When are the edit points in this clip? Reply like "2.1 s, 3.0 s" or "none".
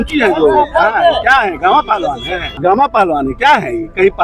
2.5 s